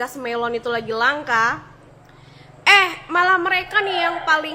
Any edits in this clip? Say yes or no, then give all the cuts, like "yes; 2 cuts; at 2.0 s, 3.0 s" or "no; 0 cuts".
no; 0 cuts